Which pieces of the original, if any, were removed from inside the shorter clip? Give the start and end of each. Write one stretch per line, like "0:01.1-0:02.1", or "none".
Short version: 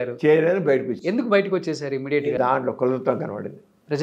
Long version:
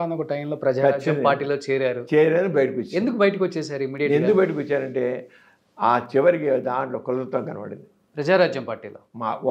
0:04.2-0:06.6